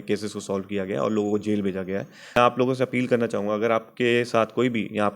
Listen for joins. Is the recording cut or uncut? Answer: cut